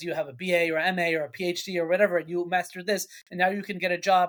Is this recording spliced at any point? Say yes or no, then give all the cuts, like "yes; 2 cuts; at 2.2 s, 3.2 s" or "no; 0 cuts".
no; 0 cuts